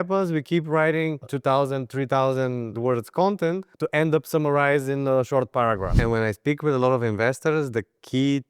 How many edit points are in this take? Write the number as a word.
one